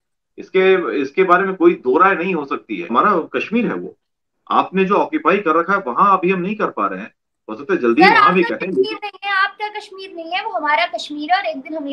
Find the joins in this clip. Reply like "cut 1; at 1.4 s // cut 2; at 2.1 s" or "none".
cut 1; at 2.9 s